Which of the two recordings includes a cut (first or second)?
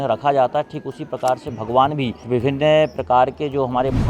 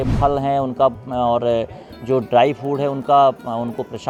first